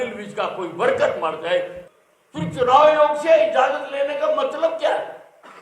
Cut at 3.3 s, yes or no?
no